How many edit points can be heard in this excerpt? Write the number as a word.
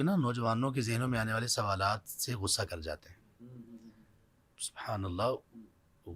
zero